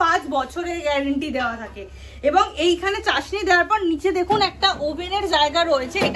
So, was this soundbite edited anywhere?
no; 0 cuts

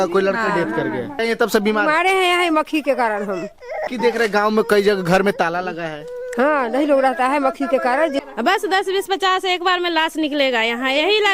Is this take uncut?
no; 3 cuts; at 1.1 s, 3.9 s, 8.2 s

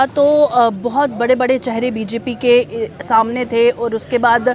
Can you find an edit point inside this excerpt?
no; 0 cuts

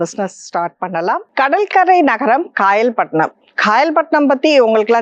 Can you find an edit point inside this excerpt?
yes; 1 cut; at 1.3 s

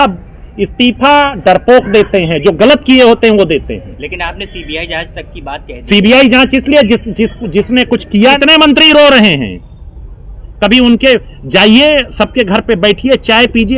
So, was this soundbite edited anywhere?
yes; 1 cut; at 8.4 s

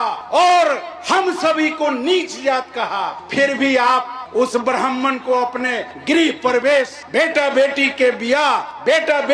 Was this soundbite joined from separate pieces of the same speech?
no; 0 cuts

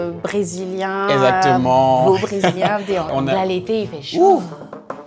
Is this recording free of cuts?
no; 1 cut; at 3.1 s

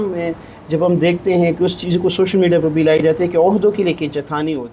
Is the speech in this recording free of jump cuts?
yes; 0 cuts

